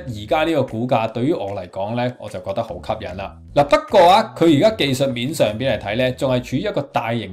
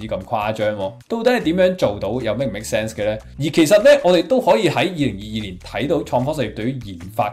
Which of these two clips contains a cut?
second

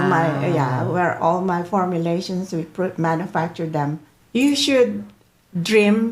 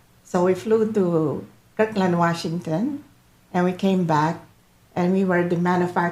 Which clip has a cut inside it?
first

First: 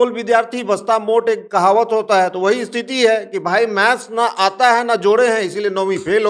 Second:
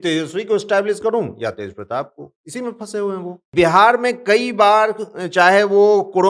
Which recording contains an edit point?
second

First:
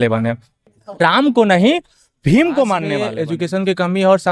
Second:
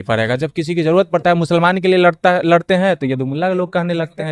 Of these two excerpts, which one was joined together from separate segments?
first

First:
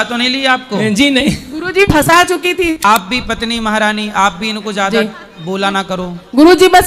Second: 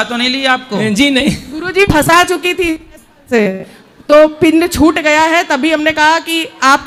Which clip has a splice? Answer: first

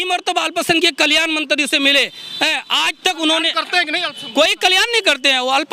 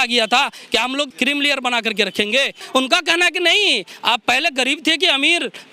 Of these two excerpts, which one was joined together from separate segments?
second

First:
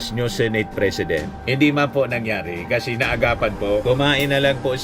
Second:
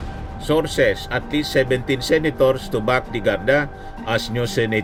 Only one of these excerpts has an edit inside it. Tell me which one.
first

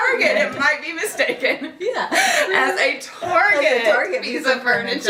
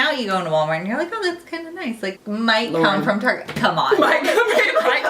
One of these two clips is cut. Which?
second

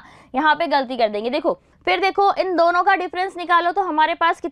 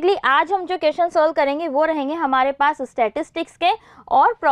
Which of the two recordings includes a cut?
first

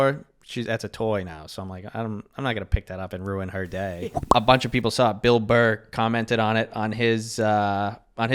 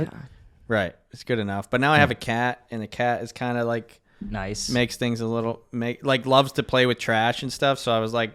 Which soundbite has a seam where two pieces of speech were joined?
first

